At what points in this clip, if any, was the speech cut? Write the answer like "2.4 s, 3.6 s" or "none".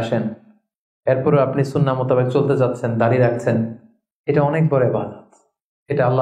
none